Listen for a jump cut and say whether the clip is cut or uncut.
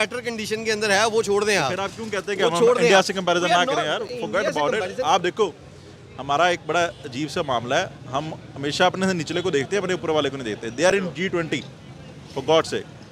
uncut